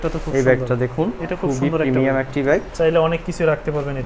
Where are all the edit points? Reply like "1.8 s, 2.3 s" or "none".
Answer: 2.7 s